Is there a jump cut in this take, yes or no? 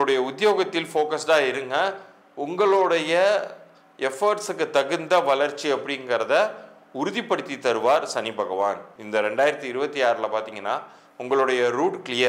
yes